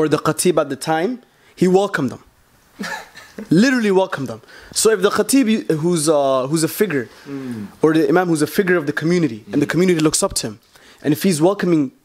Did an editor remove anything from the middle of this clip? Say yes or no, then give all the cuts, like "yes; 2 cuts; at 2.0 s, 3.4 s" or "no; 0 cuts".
no; 0 cuts